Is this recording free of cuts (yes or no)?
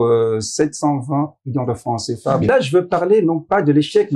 no